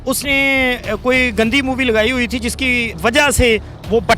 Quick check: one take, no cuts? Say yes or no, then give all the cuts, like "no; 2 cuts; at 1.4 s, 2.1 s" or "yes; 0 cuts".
no; 1 cut; at 2.9 s